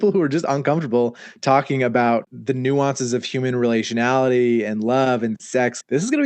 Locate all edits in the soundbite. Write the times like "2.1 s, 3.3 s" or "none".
2.3 s